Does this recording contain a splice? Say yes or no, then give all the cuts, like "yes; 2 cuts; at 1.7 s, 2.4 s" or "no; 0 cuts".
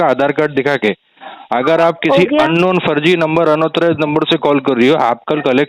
no; 0 cuts